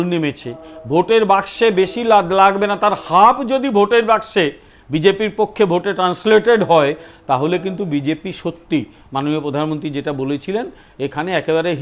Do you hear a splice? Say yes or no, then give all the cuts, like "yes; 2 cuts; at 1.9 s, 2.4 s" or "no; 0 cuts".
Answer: no; 0 cuts